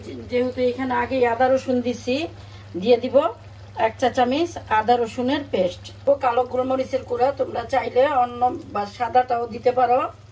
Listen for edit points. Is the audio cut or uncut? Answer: cut